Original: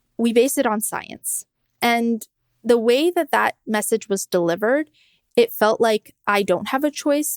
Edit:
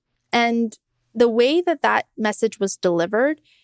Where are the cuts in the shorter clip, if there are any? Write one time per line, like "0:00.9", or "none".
none